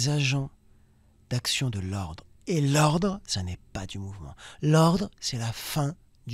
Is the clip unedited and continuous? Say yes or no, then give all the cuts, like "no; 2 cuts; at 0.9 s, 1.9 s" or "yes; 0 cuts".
yes; 0 cuts